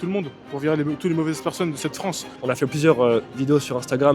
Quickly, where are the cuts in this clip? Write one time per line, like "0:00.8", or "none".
0:02.4